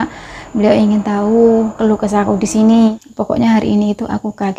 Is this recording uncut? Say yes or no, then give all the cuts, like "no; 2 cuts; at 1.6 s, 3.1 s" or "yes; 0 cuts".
no; 1 cut; at 3.0 s